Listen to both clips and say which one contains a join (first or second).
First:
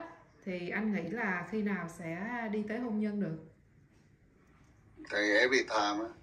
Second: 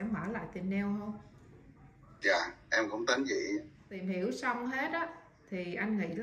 second